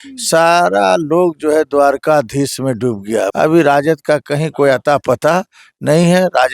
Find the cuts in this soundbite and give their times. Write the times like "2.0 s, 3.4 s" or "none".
3.3 s